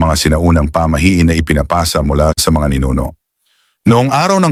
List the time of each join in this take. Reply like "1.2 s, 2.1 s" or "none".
none